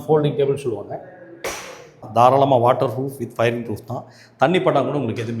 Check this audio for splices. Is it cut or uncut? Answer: cut